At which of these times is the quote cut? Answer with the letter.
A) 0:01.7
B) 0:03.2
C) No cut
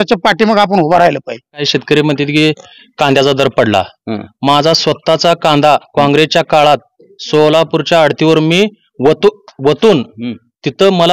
A